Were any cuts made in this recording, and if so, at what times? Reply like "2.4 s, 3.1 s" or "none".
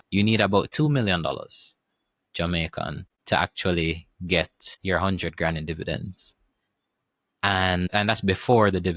3.1 s, 4.6 s, 7.9 s